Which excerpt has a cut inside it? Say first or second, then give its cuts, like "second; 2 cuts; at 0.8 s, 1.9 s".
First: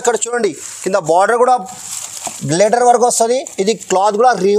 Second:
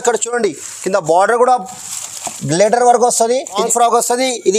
second; 1 cut; at 3.6 s